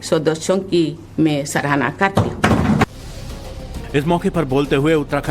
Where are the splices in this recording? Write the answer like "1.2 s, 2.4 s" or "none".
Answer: 1.4 s